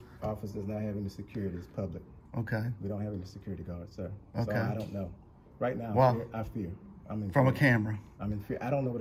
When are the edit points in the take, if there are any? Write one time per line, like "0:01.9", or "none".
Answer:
none